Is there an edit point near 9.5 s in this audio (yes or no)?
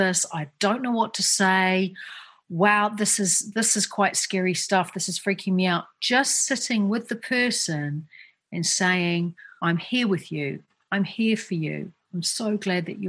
yes